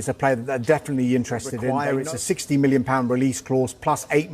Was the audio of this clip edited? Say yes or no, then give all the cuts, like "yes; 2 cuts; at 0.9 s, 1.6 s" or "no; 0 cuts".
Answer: yes; 1 cut; at 1.7 s